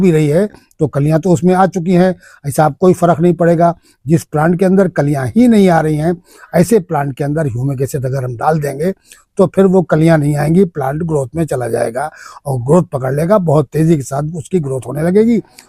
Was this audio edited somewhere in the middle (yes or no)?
no